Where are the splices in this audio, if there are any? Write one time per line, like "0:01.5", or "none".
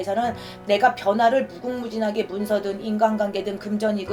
none